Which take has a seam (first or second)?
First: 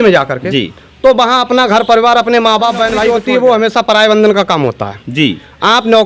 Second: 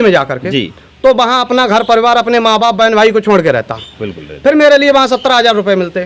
first